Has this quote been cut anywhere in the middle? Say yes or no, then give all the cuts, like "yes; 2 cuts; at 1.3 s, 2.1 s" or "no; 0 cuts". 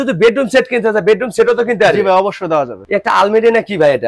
yes; 1 cut; at 2.8 s